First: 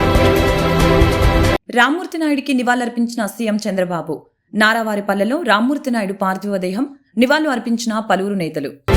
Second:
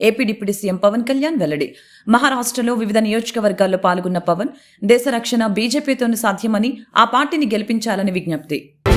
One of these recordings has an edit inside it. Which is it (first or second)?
first